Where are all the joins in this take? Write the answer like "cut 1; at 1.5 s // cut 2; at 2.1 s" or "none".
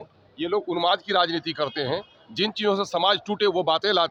none